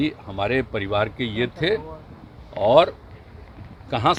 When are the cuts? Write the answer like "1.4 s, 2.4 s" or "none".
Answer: none

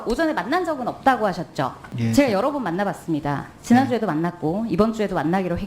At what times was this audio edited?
1.8 s

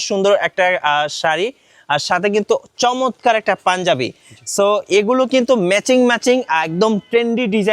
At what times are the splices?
none

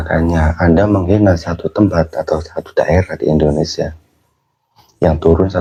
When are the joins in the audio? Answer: none

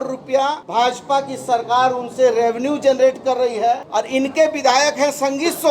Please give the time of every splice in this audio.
3.8 s

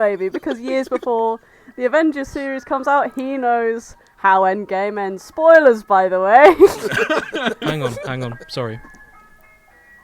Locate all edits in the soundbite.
6.8 s

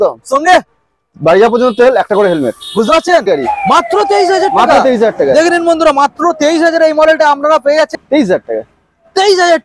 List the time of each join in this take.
3.3 s, 8.0 s

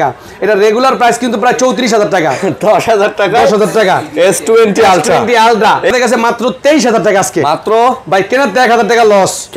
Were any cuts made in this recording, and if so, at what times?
5.9 s

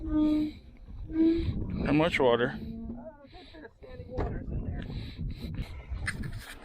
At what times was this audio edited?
5.7 s

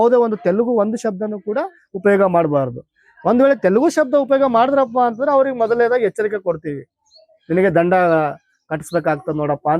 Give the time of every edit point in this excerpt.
none

